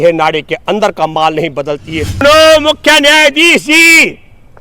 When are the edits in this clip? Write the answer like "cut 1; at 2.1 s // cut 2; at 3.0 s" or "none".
cut 1; at 2.2 s